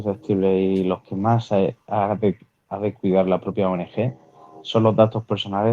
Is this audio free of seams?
yes; 0 cuts

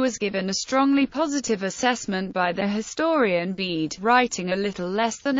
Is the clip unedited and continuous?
yes; 0 cuts

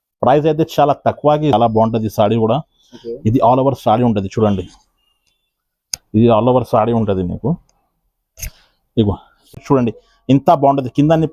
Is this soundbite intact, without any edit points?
no; 2 cuts; at 1.5 s, 9.6 s

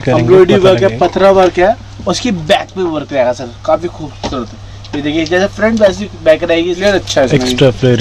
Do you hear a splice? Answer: yes; 1 cut; at 6.7 s

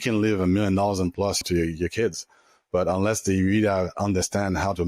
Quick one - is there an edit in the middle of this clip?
yes; 1 cut; at 1.4 s

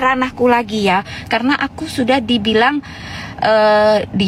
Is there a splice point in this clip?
no; 0 cuts

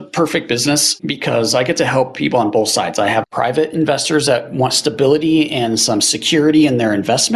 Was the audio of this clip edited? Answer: yes; 2 cuts; at 1.0 s, 3.2 s

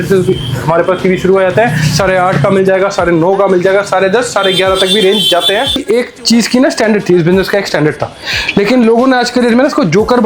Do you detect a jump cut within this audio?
yes; 1 cut; at 5.8 s

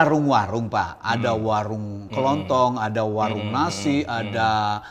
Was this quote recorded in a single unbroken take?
yes; 0 cuts

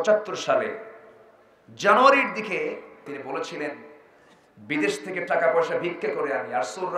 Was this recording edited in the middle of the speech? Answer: yes; 1 cut; at 3.1 s

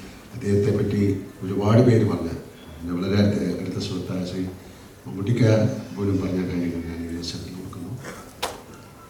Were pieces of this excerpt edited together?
no; 0 cuts

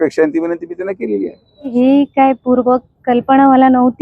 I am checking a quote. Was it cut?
yes; 1 cut; at 1.7 s

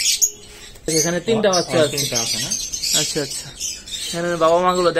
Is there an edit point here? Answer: yes; 1 cut; at 0.9 s

